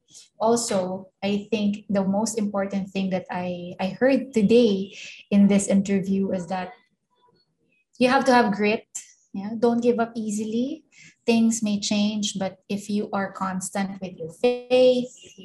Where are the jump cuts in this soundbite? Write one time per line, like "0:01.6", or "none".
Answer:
0:11.0